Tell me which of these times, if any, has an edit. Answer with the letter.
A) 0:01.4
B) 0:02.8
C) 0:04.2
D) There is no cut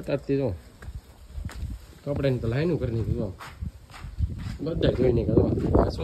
D